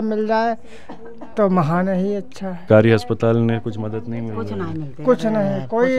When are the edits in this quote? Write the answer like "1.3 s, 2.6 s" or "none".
2.6 s